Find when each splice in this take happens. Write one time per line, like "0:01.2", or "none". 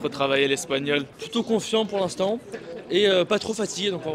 0:01.1

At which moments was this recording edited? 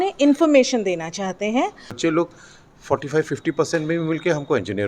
0:02.0

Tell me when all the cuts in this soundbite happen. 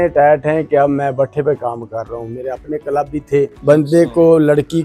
0:03.5

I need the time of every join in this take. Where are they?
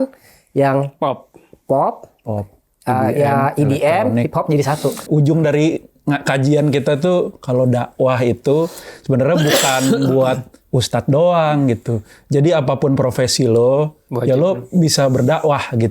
0:05.0

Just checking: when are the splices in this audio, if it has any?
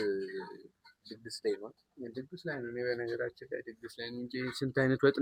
none

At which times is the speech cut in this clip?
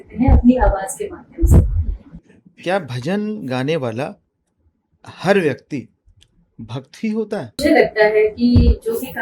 0:02.1
0:07.6

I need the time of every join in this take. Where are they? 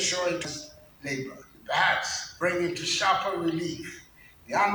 0:01.5
0:02.2

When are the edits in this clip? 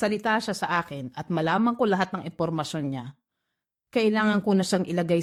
none

